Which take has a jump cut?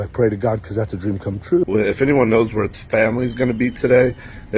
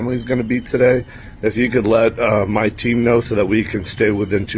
first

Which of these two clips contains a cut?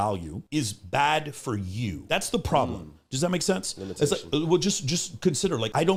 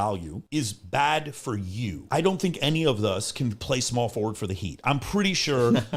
second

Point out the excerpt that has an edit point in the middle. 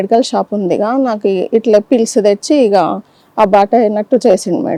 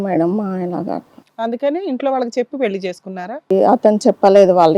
second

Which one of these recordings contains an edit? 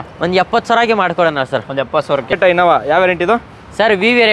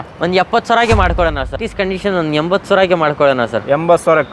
second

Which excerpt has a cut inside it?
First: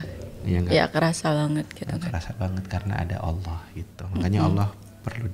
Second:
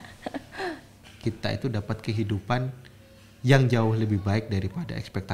second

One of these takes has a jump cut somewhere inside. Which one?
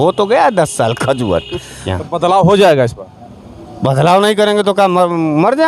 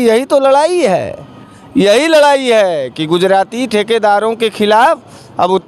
first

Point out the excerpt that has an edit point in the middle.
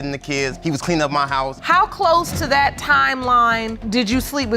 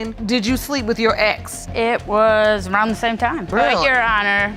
first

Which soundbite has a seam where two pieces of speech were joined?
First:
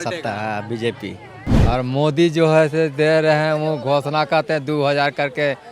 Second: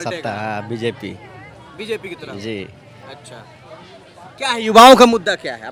first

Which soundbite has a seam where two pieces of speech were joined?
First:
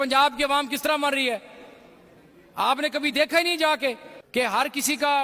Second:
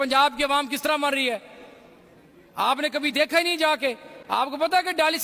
first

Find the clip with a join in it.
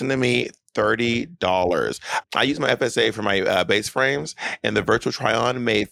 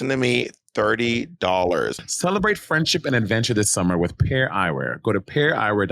second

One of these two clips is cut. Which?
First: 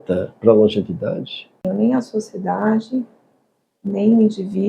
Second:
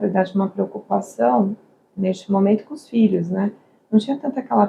first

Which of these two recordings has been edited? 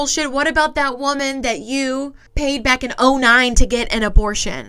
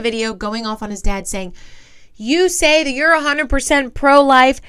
first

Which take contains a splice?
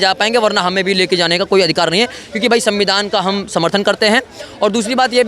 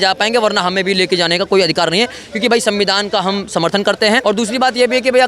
second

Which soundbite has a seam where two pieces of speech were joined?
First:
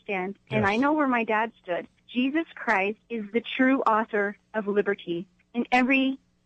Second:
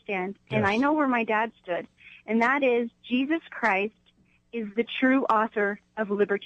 first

